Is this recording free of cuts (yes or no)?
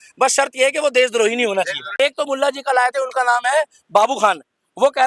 no